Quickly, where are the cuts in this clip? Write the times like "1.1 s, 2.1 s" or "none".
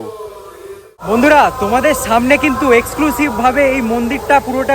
1.0 s